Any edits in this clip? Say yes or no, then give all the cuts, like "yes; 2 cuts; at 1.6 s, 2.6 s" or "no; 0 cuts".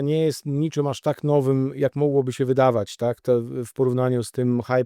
no; 0 cuts